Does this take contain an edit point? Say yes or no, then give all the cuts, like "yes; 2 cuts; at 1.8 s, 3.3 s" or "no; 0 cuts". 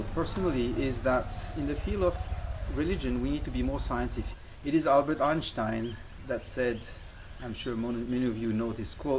no; 0 cuts